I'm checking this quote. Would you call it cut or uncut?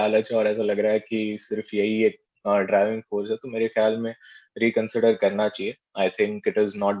uncut